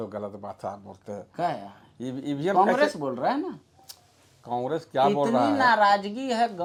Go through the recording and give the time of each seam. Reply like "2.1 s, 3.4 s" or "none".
none